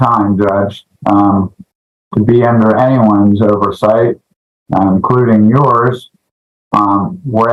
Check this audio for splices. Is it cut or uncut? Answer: uncut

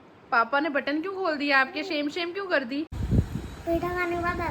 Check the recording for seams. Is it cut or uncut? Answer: cut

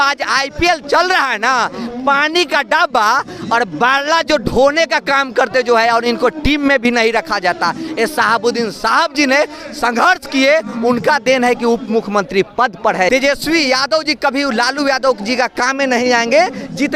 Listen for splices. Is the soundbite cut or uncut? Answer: cut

